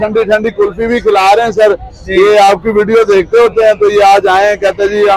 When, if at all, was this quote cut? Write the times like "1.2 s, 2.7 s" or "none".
none